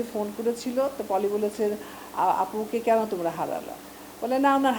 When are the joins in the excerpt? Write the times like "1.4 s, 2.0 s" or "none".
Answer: none